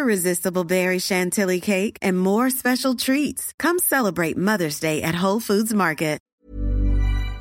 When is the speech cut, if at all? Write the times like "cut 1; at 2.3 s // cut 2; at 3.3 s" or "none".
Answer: cut 1; at 6.3 s